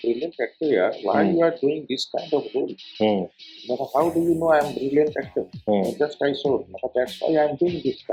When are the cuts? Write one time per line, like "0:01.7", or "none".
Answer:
none

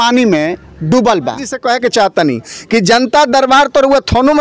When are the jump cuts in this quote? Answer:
0:01.6

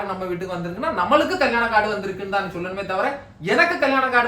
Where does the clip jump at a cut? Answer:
none

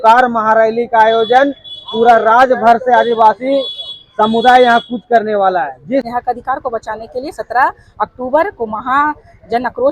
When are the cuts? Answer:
0:06.1

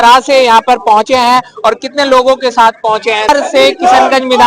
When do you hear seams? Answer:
0:03.3

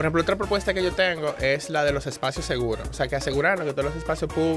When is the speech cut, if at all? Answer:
none

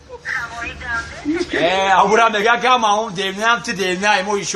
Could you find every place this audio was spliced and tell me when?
0:02.9

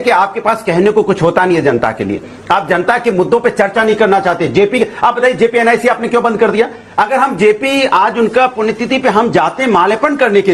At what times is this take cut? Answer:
none

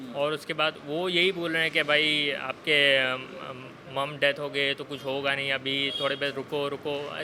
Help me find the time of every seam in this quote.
none

